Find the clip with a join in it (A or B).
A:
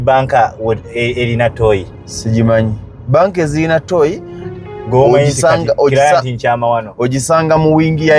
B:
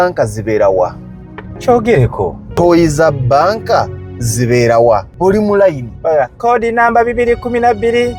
B